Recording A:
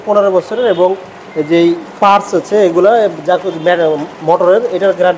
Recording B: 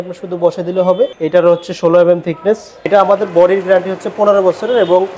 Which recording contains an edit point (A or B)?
B